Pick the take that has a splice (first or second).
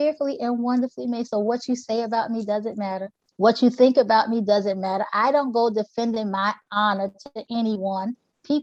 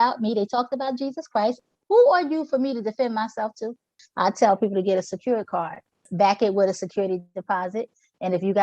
second